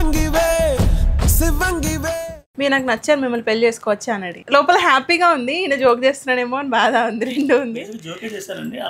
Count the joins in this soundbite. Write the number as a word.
two